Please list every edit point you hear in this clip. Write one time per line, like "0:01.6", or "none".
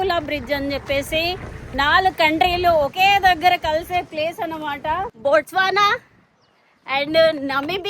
0:01.6
0:05.0